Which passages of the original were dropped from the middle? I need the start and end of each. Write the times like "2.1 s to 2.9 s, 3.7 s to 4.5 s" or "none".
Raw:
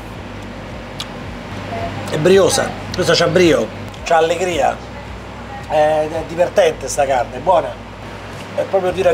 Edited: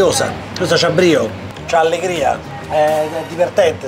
4.9 s to 5.5 s